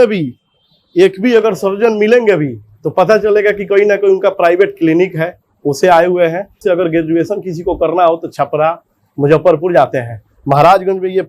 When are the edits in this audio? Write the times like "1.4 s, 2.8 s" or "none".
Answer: 6.6 s